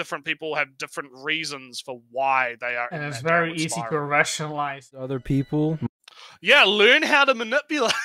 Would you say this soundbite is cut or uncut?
cut